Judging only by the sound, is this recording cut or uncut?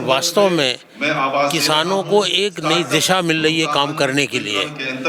uncut